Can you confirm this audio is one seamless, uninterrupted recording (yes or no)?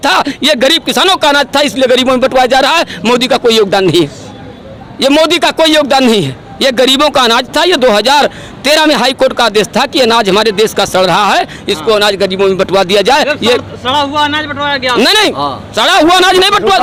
yes